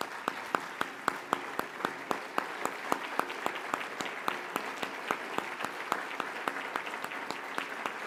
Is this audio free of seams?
yes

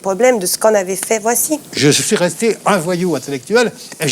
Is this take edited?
yes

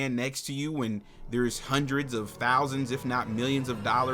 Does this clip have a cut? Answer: no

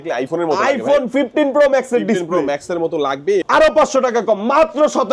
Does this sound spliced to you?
yes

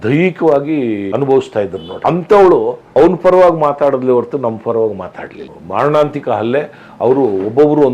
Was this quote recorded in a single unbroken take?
no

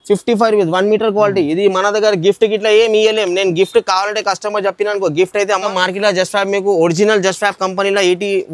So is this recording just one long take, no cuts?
no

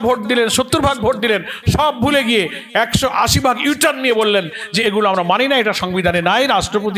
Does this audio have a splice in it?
no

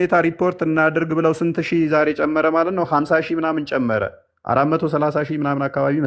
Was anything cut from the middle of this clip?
no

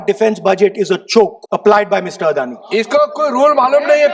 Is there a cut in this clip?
yes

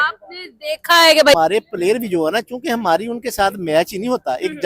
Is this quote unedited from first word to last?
no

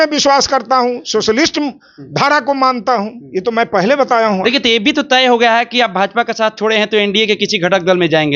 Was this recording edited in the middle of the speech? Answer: no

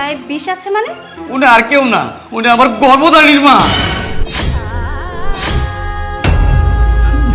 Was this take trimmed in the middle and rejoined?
yes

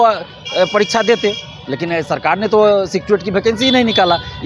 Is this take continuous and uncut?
yes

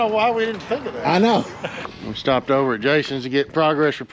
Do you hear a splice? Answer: yes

